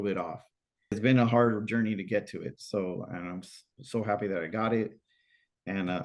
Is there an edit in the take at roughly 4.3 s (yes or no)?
no